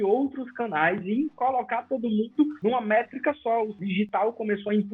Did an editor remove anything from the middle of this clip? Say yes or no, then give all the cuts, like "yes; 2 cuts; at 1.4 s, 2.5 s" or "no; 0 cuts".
yes; 2 cuts; at 2.5 s, 3.8 s